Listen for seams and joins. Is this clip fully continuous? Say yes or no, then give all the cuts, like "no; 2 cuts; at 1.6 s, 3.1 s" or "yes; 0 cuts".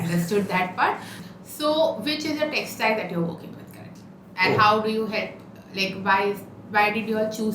no; 1 cut; at 1.2 s